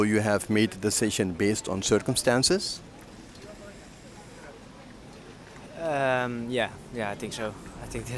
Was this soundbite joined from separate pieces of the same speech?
no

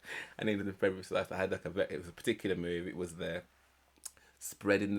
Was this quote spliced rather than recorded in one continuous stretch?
no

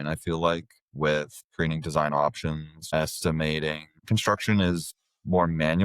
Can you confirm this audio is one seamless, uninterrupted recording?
no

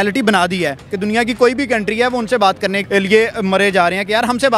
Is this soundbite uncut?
no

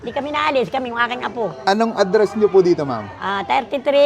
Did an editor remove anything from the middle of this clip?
no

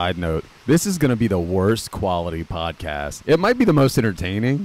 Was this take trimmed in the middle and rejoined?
no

